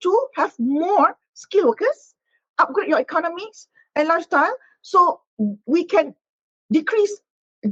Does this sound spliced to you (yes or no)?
no